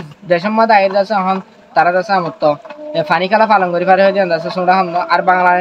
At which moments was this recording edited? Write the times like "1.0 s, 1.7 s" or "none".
none